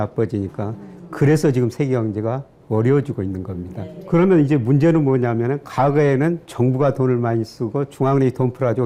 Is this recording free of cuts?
yes; 0 cuts

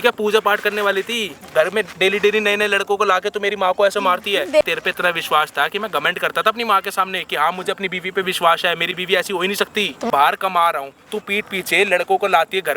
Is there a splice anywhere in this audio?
yes; 3 cuts; at 1.5 s, 4.6 s, 10.1 s

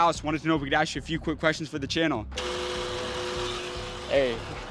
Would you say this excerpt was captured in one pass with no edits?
no; 1 cut; at 2.4 s

